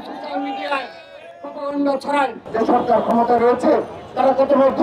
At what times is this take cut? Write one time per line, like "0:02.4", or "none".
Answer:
0:02.4